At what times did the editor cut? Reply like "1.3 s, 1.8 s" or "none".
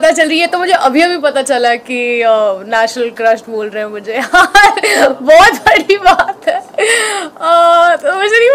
none